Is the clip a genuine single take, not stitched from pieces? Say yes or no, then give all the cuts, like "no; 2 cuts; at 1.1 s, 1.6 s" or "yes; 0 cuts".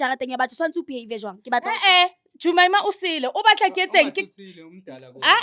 yes; 0 cuts